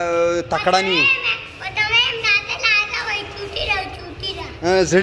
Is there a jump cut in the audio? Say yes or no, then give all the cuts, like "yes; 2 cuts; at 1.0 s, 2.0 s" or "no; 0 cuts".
no; 0 cuts